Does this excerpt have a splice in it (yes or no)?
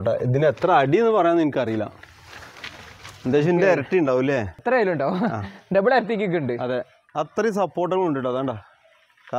yes